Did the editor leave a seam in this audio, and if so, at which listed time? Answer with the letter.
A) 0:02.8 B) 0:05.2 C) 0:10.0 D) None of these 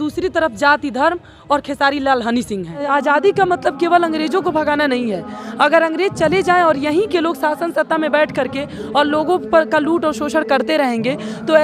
A